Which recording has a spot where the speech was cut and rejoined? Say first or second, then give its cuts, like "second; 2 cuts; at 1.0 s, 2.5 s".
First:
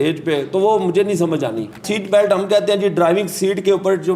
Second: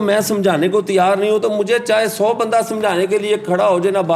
first; 1 cut; at 1.8 s